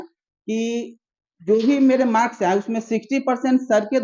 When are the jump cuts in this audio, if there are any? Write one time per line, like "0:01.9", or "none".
none